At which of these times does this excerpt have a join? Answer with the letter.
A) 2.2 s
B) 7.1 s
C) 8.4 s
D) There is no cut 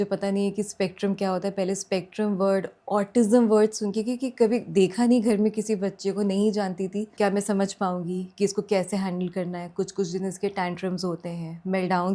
B